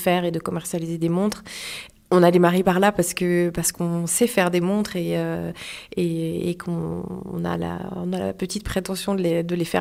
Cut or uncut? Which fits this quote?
uncut